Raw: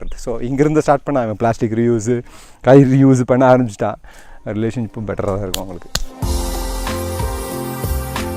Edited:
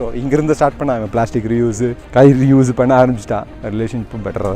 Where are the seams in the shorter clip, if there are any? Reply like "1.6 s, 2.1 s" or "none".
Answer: 2.0 s, 3.5 s